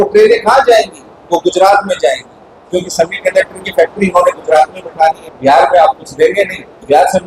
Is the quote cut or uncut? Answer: cut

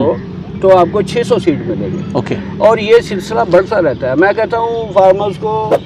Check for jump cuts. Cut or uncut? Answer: uncut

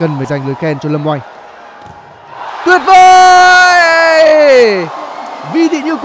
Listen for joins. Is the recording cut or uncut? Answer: uncut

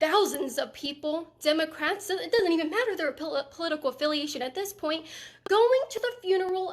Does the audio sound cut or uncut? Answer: cut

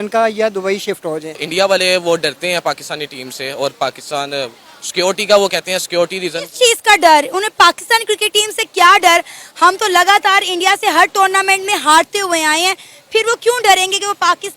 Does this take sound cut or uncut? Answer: cut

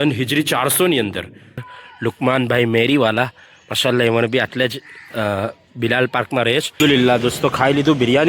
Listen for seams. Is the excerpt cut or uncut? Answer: cut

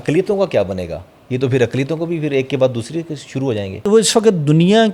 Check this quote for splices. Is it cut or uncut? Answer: cut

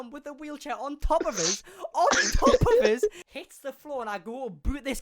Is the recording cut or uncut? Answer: cut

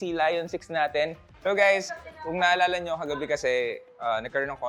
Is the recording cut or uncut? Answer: cut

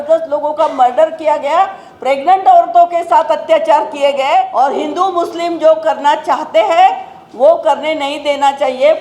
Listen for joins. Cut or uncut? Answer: cut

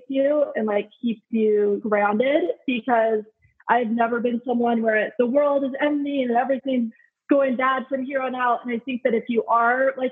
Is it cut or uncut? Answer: cut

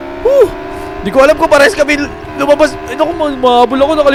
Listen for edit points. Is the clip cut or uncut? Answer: uncut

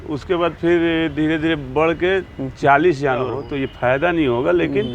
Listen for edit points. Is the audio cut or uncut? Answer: cut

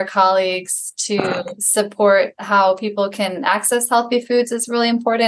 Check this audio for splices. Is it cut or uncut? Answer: cut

